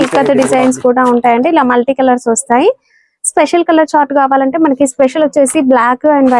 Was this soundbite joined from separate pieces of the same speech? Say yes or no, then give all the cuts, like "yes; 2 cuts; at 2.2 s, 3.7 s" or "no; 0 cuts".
no; 0 cuts